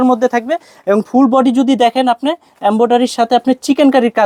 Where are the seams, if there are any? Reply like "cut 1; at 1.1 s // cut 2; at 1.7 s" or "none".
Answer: none

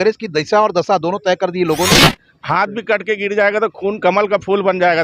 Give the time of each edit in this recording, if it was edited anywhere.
cut 1; at 2.2 s

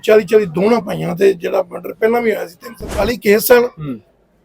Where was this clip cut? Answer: cut 1; at 3.0 s

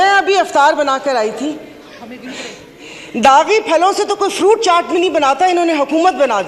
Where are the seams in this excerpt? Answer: none

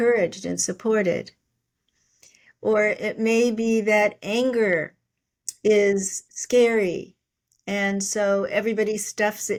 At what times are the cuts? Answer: none

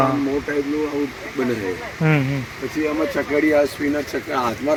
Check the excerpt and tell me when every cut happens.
none

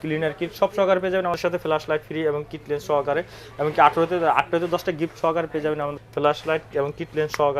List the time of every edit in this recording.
cut 1; at 1.4 s // cut 2; at 6.0 s

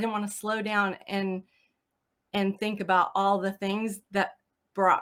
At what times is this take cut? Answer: none

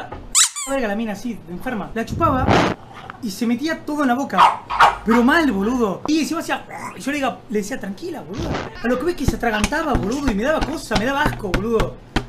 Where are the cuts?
none

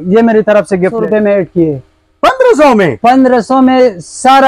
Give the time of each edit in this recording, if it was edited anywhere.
cut 1; at 1.0 s

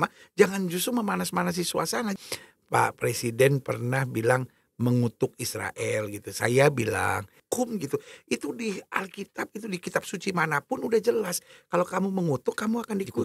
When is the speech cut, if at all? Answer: cut 1; at 2.2 s // cut 2; at 7.5 s

